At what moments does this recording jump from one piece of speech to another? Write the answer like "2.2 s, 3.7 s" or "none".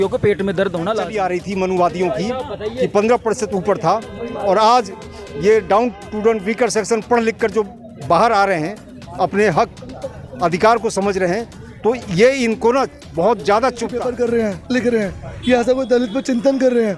1.1 s, 14.0 s